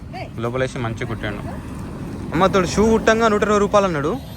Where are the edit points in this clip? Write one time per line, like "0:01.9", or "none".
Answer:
0:02.3